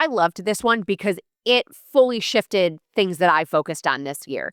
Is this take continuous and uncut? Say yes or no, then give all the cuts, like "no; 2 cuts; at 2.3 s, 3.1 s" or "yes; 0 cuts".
yes; 0 cuts